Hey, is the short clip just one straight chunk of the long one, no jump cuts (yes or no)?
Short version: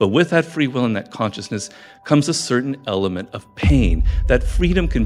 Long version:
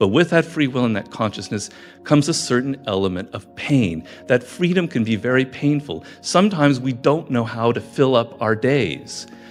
yes